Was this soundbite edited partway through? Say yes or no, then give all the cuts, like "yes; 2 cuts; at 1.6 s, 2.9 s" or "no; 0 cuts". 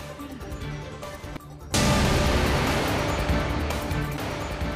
yes; 1 cut; at 0.9 s